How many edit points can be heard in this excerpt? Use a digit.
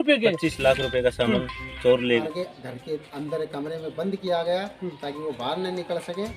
1